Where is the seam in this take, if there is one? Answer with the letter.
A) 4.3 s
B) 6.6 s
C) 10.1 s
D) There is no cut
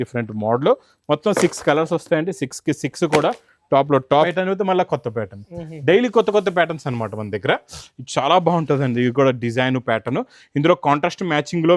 A